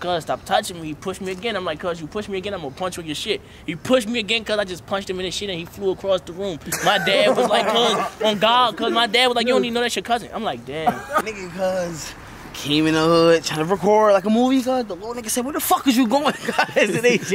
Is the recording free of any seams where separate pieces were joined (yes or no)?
no